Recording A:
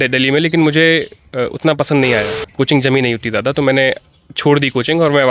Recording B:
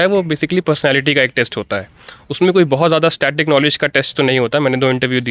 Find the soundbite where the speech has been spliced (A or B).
A